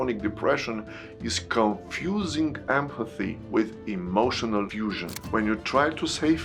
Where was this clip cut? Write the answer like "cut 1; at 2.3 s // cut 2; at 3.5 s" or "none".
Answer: cut 1; at 5.1 s